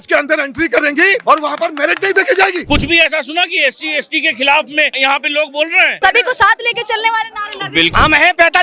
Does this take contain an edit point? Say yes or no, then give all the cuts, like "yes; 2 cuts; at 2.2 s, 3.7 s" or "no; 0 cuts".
yes; 5 cuts; at 1.2 s, 2.6 s, 4.9 s, 6.0 s, 7.9 s